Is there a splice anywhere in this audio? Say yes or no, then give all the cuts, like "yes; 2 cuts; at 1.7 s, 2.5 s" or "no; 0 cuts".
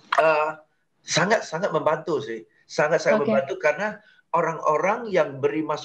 no; 0 cuts